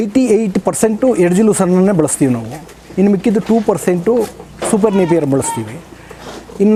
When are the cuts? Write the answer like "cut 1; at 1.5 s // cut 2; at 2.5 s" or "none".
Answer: none